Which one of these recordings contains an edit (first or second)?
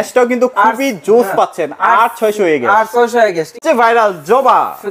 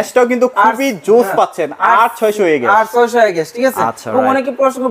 first